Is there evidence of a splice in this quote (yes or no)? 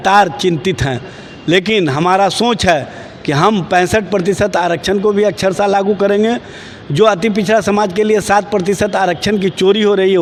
no